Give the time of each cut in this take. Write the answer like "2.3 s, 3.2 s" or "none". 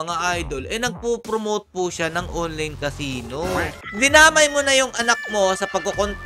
3.8 s